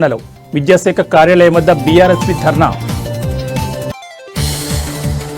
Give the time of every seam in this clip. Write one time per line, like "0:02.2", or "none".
none